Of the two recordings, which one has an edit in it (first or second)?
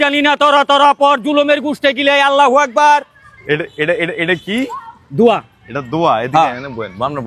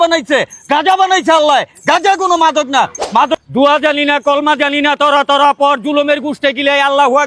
second